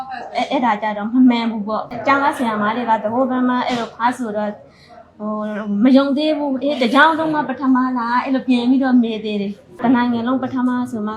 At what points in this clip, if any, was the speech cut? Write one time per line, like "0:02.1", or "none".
0:01.9
0:09.8